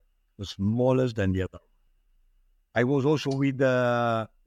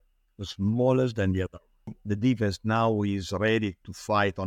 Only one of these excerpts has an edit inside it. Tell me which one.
second; 1 cut; at 2.0 s

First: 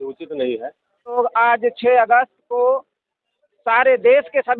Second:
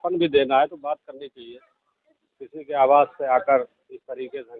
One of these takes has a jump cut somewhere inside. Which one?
first; 1 cut; at 1.2 s

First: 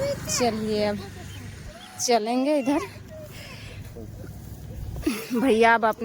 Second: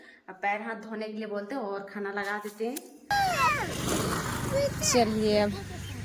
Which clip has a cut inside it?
second; 1 cut; at 3.1 s

